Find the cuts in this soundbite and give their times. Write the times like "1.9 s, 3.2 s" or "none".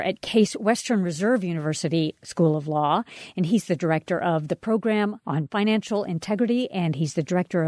none

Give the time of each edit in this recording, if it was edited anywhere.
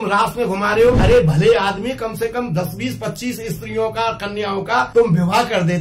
1.0 s, 4.9 s

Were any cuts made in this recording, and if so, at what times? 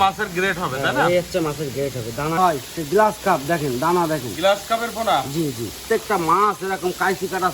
2.4 s, 5.8 s

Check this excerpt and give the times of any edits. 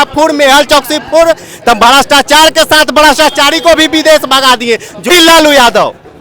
5.1 s

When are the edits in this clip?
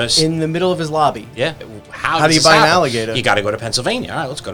1.6 s

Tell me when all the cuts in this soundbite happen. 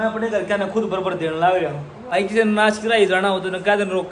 1.9 s

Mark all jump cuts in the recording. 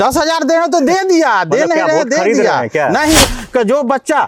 3.2 s

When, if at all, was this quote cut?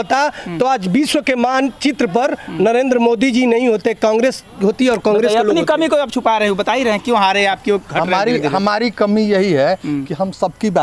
none

